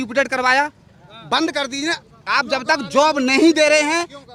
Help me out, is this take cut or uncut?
uncut